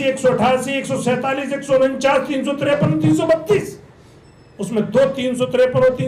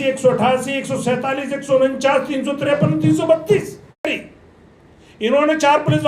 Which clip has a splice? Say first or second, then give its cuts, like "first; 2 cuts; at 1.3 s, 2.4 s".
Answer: second; 1 cut; at 4.1 s